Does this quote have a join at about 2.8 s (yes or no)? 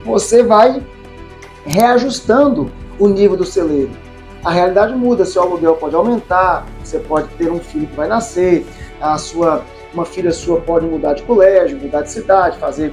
yes